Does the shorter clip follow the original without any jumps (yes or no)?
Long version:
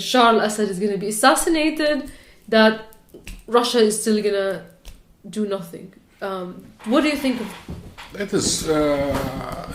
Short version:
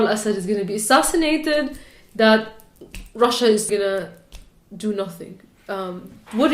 no